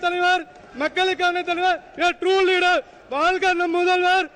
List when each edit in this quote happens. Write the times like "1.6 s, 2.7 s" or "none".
none